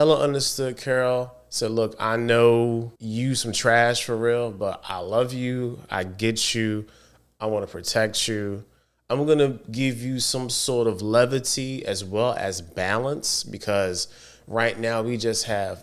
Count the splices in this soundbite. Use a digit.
1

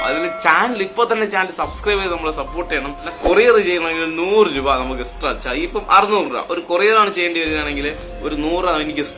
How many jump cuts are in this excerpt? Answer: 1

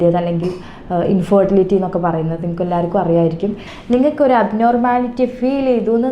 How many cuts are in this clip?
1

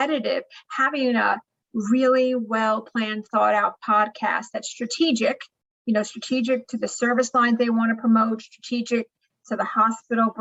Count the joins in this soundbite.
0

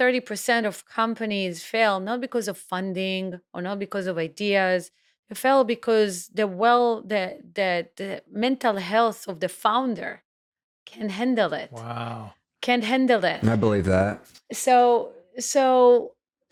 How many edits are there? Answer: 0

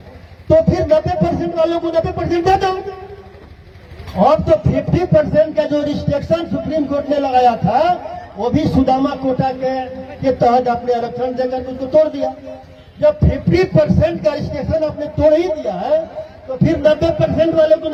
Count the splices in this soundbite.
0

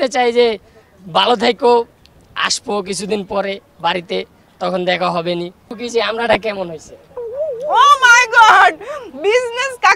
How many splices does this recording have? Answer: 1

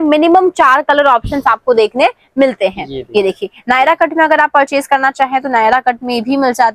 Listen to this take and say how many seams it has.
0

